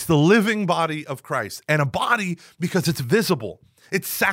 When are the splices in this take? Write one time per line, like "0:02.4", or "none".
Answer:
none